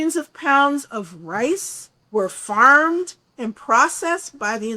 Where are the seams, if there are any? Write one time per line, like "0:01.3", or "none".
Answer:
0:01.9